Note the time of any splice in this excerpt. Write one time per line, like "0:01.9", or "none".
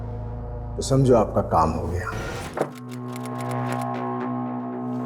0:02.4